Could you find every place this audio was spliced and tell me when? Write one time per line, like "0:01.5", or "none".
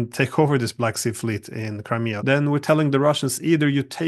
0:02.2